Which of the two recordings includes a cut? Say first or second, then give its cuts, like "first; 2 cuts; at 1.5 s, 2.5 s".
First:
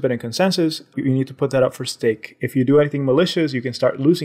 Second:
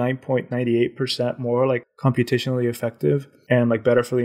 second; 2 cuts; at 1.9 s, 3.3 s